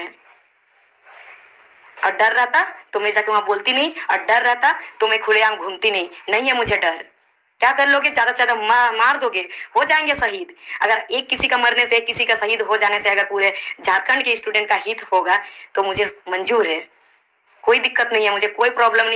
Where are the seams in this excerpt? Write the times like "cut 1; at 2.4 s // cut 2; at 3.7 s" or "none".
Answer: none